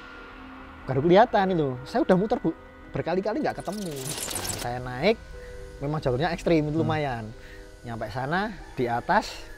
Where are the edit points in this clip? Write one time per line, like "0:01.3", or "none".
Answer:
0:04.1